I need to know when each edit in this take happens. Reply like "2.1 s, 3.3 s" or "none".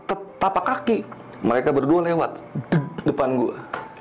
none

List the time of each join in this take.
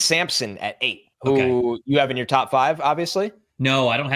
1.0 s

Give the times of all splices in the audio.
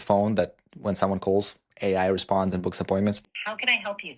3.2 s

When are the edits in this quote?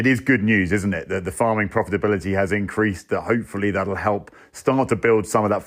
none

